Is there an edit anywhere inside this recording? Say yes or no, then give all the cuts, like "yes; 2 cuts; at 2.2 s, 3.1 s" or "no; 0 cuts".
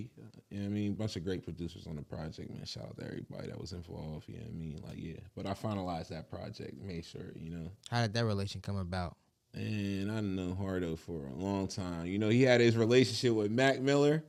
no; 0 cuts